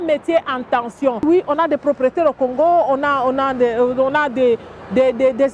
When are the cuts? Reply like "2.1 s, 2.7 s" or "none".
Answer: 1.2 s

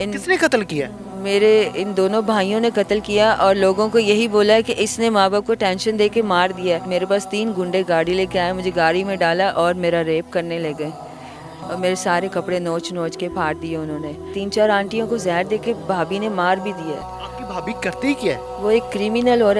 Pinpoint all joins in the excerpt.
6.9 s, 14.3 s

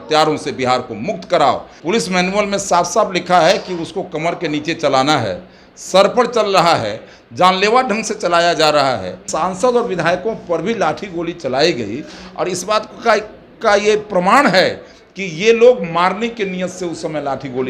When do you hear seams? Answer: 1.7 s, 9.2 s

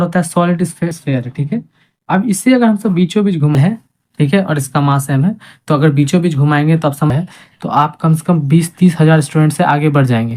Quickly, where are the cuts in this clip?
0.9 s, 3.6 s, 7.1 s

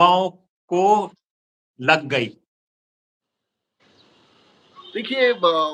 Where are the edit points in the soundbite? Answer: none

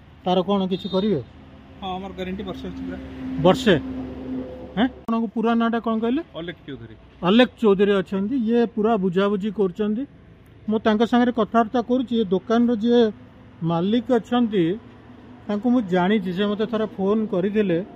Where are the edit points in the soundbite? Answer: 5.1 s

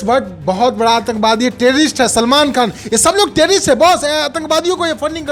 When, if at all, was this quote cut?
none

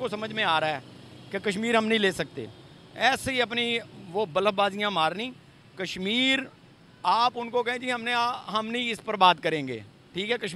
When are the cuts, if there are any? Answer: none

